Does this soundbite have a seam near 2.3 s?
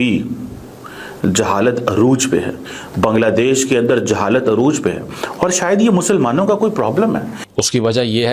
no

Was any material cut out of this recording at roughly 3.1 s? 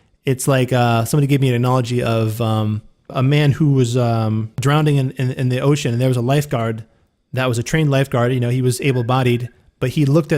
yes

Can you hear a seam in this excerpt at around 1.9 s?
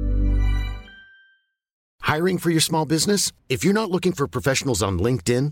yes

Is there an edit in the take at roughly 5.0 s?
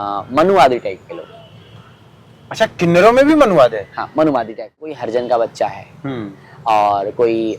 yes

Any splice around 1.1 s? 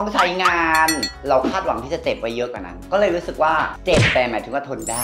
yes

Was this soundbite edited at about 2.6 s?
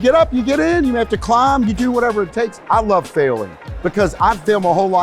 yes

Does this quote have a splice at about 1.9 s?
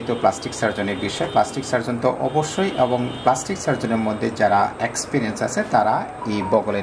no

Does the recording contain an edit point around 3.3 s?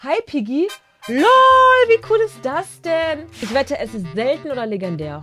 yes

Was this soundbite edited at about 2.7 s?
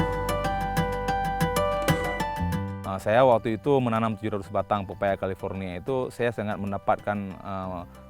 yes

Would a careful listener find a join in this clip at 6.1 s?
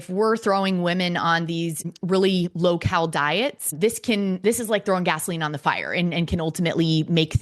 no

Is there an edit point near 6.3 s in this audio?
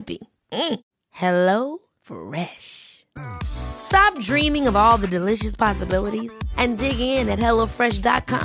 no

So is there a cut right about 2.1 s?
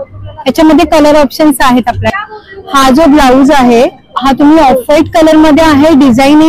yes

